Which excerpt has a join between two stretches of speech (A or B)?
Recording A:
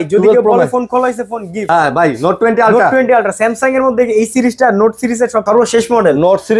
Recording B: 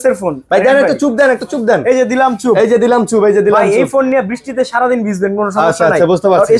A